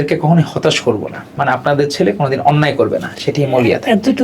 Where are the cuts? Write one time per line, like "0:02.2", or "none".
0:01.3